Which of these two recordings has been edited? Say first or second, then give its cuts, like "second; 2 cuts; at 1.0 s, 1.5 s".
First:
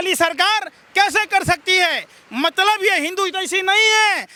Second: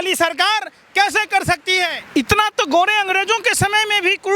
second; 1 cut; at 2.0 s